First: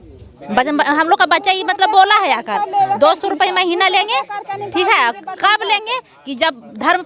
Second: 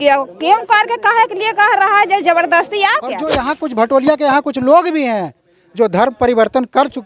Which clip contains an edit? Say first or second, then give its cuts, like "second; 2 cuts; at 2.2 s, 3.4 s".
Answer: second; 1 cut; at 3.4 s